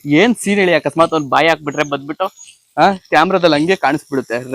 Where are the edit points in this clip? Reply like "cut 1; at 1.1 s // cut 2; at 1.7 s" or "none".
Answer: none